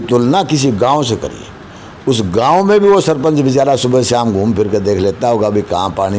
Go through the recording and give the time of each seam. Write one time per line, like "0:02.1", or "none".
none